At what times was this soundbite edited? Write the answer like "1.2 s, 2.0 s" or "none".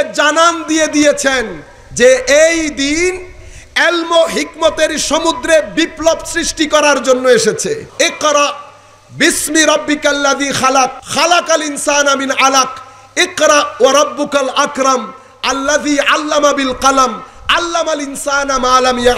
7.9 s, 11.0 s

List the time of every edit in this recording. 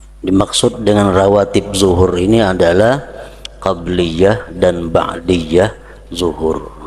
none

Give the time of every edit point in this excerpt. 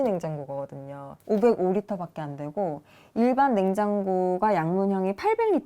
1.1 s

